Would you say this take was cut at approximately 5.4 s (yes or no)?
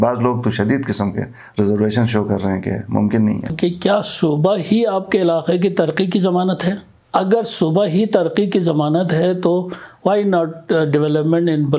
no